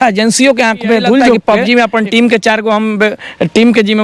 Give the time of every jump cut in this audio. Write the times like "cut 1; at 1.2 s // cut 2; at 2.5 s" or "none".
cut 1; at 1.4 s

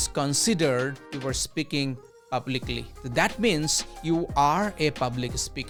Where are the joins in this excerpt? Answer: none

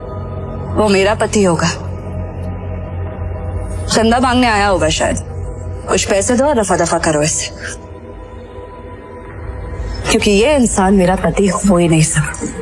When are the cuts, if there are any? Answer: none

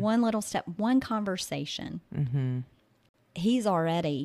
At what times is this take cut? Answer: cut 1; at 2.9 s

